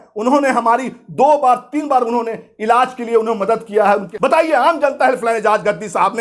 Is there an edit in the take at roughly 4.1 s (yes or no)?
yes